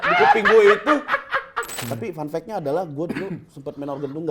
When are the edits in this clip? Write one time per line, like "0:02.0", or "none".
0:01.9